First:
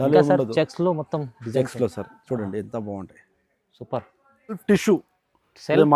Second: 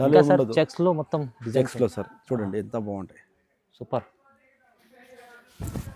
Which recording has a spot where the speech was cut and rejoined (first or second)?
first